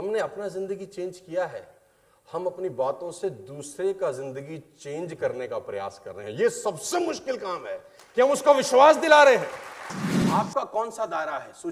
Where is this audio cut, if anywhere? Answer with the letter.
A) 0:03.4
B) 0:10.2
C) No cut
B